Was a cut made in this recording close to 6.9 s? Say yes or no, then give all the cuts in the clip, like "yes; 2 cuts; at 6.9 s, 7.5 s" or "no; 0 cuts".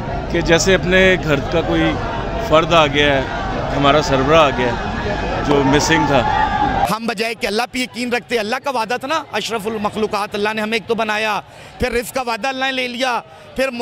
yes; 1 cut; at 6.9 s